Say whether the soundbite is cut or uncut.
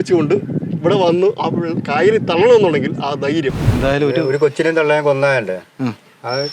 cut